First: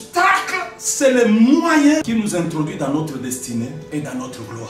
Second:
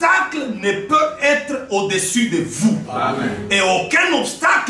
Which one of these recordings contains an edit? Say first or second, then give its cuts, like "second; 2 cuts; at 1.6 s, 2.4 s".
first; 2 cuts; at 2.0 s, 3.8 s